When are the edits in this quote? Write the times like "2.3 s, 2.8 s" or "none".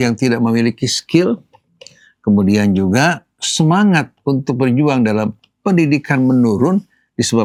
none